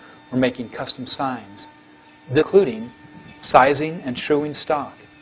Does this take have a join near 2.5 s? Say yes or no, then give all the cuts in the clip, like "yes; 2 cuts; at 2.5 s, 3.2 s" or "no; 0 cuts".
no; 0 cuts